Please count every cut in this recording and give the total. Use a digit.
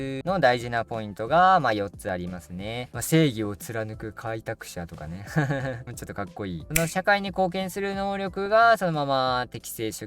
2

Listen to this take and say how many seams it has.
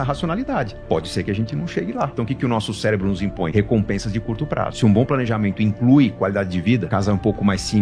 4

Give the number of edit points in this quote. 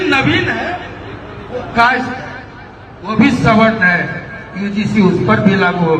0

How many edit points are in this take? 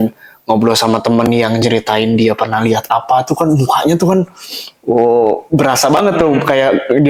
0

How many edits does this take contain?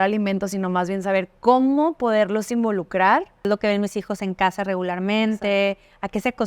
1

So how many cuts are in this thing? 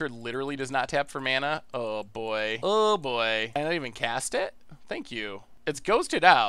3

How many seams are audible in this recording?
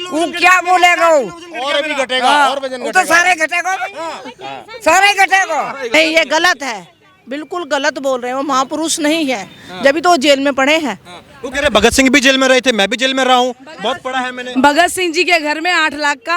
1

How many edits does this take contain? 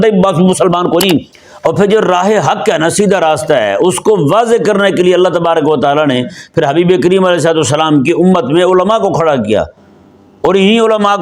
1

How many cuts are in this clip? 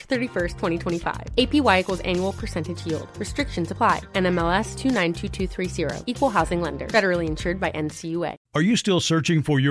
1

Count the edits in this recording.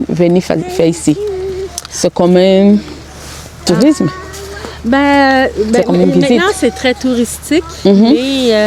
0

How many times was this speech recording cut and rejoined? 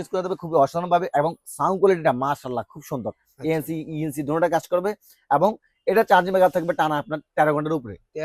0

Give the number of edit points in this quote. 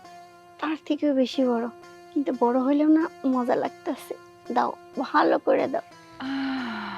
1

